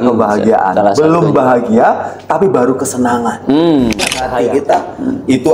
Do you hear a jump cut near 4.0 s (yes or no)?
yes